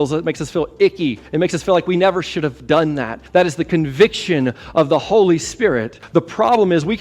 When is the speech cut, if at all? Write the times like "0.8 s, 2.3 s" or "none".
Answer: 1.2 s, 3.2 s, 5.9 s